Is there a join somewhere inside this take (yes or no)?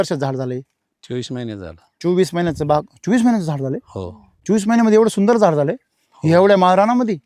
no